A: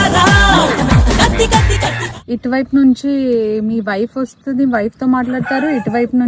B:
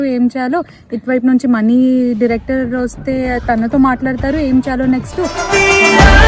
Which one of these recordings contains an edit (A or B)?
A